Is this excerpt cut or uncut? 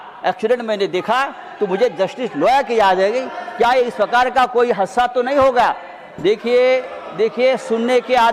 uncut